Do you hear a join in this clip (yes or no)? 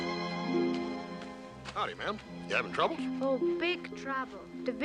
no